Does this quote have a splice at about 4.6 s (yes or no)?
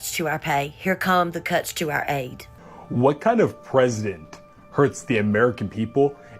no